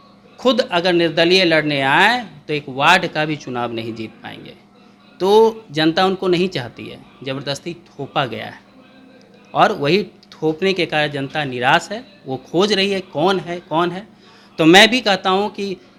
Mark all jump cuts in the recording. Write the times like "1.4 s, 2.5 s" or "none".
none